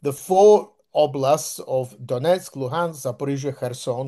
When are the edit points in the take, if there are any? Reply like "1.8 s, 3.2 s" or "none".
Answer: none